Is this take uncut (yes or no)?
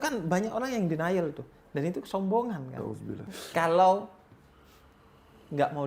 no